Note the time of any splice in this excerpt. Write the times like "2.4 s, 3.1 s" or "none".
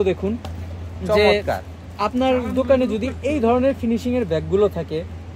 none